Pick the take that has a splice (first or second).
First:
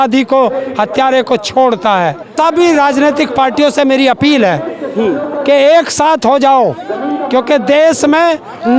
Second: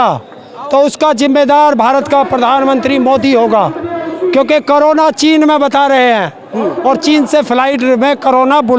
first